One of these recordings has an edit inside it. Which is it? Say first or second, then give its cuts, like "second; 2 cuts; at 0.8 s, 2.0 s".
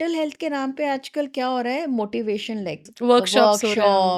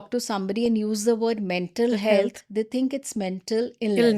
first; 1 cut; at 2.9 s